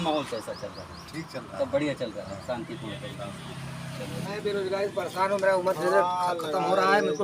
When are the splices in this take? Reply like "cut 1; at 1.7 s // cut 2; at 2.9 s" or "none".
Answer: cut 1; at 4.2 s